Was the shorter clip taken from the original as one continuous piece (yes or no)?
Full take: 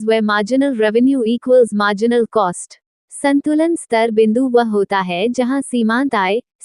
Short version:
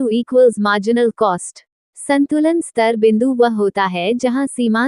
yes